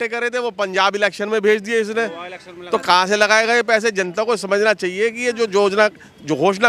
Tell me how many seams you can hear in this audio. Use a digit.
0